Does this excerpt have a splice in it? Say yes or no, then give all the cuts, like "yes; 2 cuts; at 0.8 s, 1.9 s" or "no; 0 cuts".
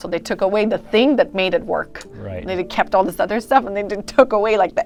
no; 0 cuts